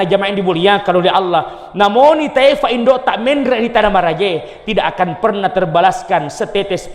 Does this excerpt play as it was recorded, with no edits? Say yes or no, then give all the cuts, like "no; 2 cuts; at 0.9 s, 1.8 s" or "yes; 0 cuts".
yes; 0 cuts